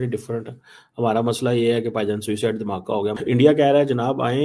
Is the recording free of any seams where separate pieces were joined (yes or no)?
no